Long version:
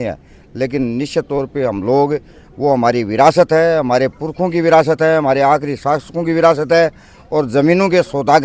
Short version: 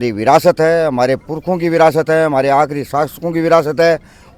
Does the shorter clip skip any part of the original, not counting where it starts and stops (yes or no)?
no